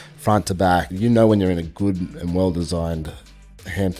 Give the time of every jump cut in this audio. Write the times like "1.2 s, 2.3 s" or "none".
0.9 s